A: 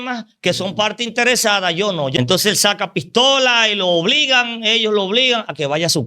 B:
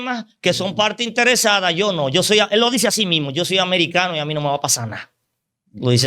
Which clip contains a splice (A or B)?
A